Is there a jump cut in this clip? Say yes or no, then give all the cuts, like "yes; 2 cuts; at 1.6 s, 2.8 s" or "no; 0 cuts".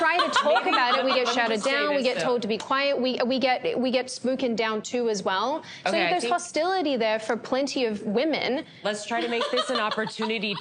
yes; 1 cut; at 3.3 s